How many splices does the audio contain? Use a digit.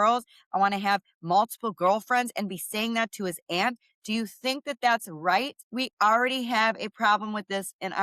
1